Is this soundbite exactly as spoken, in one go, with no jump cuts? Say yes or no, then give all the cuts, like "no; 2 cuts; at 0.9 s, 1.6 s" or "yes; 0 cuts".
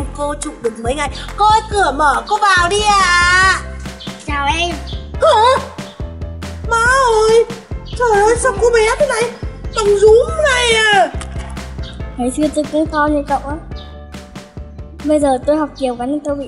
no; 2 cuts; at 13.6 s, 15.0 s